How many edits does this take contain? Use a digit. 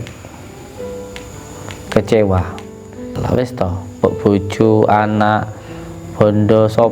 1